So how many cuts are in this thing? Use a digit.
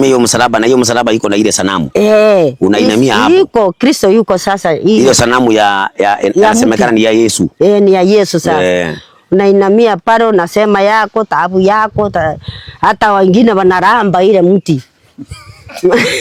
0